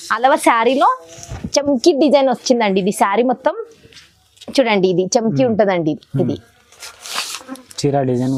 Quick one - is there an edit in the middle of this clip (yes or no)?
no